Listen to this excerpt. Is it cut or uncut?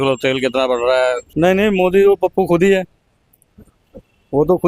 cut